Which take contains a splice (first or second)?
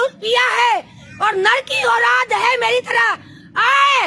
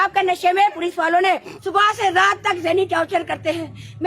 second